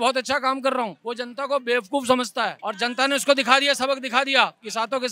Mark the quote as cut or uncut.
cut